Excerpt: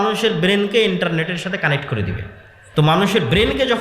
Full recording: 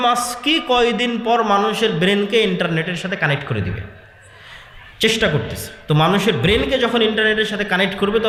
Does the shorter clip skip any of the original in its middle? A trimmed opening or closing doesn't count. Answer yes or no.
yes